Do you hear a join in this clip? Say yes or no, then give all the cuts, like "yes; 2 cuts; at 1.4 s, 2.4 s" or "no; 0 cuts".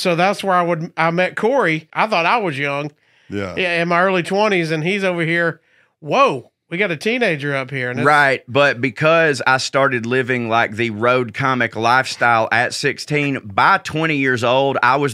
yes; 1 cut; at 1.9 s